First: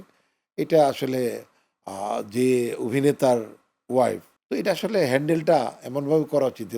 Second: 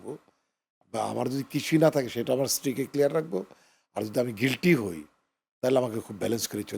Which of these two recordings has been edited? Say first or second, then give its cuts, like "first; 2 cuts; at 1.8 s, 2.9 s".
first; 1 cut; at 4.3 s